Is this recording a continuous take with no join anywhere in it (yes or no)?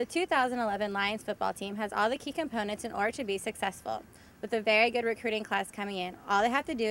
yes